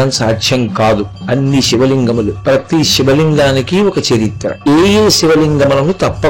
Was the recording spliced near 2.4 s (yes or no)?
yes